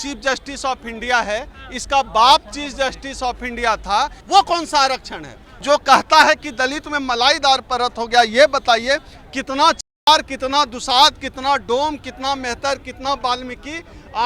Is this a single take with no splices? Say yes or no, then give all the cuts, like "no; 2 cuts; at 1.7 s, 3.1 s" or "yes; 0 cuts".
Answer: no; 2 cuts; at 4.2 s, 5.6 s